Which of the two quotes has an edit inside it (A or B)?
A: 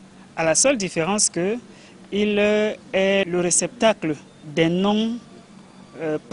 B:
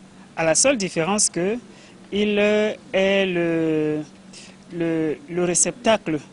A